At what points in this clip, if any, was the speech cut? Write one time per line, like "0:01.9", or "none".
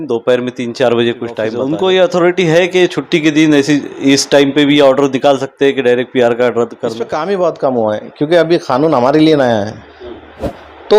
0:01.6
0:07.1